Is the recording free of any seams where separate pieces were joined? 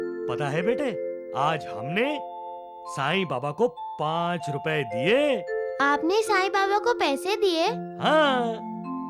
yes; 0 cuts

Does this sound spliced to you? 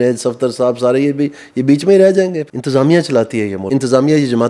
yes; 2 cuts; at 2.5 s, 3.6 s

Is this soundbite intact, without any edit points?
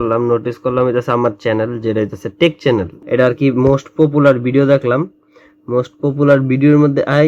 no; 1 cut; at 3.0 s

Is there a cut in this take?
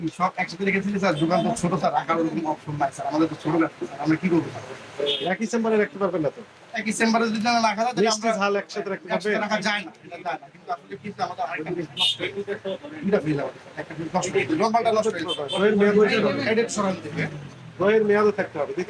no; 0 cuts

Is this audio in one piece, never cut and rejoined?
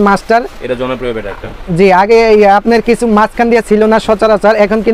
yes; 0 cuts

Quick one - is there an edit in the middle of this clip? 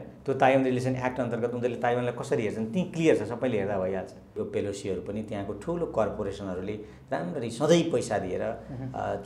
yes; 1 cut; at 4.4 s

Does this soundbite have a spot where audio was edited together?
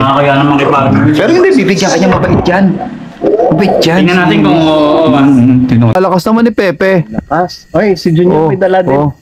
yes; 1 cut; at 5.9 s

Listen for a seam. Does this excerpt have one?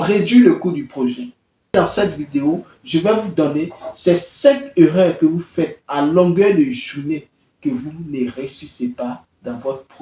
yes; 1 cut; at 1.7 s

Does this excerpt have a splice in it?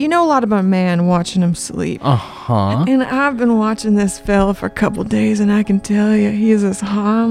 yes; 1 cut; at 2.0 s

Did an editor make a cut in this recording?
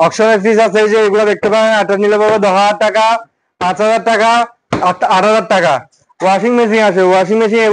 no; 0 cuts

